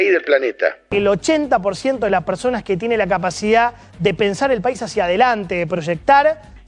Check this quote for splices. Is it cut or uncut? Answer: uncut